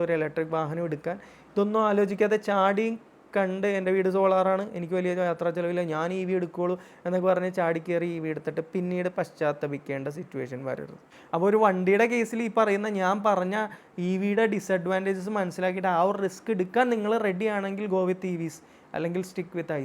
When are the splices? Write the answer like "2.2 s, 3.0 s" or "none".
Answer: 11.4 s

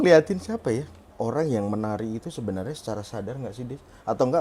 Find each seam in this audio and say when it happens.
1.1 s

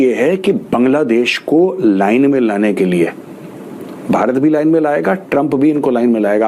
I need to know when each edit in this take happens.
none

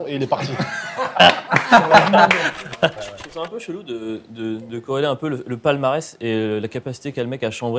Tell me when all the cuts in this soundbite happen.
2.9 s

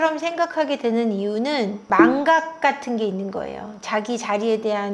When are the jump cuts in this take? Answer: 1.8 s

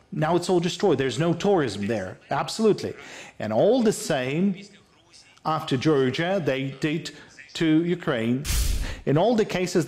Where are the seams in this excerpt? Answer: 8.6 s

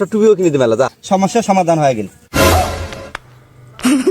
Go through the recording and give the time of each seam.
1.0 s

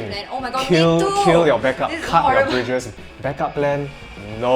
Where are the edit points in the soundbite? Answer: 2.9 s

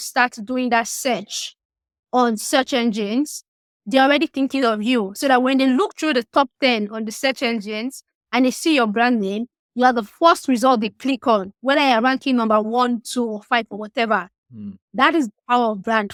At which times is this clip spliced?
none

